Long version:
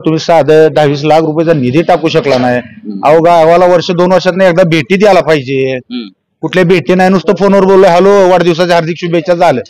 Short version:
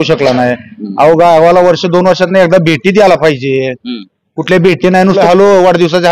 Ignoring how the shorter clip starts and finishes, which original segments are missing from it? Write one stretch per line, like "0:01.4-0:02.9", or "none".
0:07.2-0:07.9